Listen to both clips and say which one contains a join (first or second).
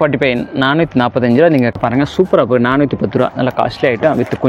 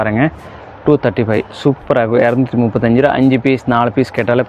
first